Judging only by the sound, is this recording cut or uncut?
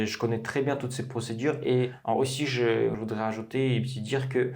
cut